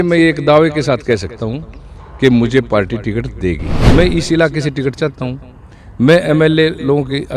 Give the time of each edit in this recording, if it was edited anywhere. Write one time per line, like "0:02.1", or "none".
0:03.7